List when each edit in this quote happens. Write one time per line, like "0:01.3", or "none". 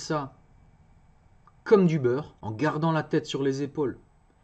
0:02.4